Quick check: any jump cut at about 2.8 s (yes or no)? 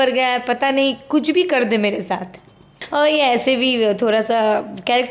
yes